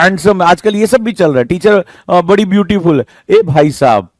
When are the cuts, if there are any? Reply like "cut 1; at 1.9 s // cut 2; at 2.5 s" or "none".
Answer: none